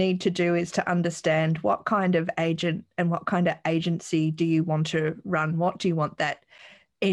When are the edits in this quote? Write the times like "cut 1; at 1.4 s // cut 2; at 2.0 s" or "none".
none